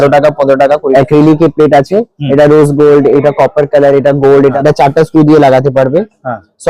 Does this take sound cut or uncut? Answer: cut